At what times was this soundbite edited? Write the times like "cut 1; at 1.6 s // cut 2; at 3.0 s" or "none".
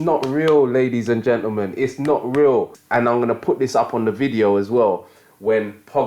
cut 1; at 2.8 s